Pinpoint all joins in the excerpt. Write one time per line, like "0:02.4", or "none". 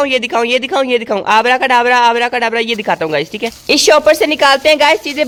none